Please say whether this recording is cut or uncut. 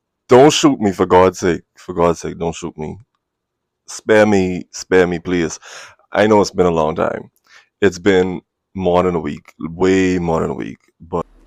uncut